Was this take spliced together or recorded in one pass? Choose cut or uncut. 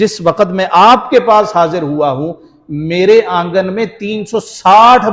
uncut